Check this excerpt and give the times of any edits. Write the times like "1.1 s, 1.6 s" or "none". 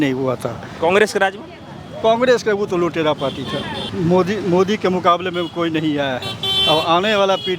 3.8 s

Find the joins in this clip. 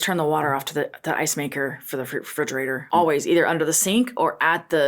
2.8 s

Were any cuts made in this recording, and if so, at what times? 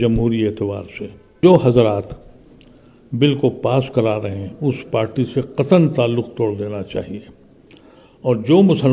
1.4 s

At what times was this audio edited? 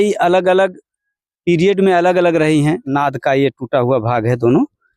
2.9 s

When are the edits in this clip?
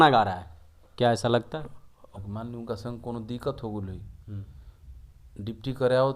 2.1 s

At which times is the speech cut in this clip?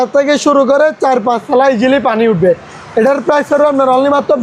none

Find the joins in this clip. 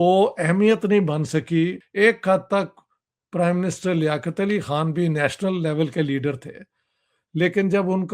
1.8 s

